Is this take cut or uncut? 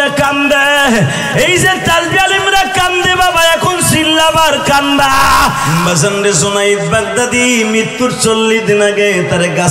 cut